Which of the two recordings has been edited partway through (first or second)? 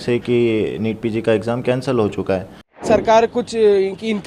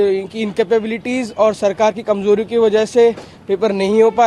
first